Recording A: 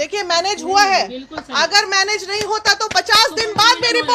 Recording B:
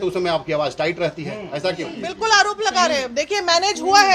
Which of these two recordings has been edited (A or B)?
B